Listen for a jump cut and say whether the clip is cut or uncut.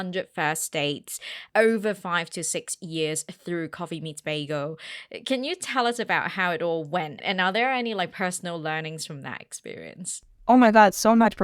cut